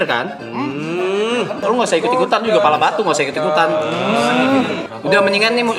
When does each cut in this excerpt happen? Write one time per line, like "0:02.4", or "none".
0:01.6
0:04.8